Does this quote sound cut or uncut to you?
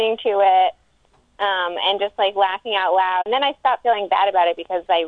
cut